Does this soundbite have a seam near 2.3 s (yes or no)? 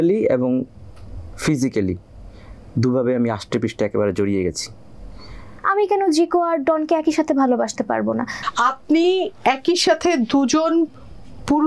no